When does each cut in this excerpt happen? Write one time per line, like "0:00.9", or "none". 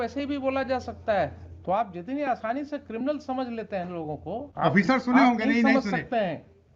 0:01.5
0:04.5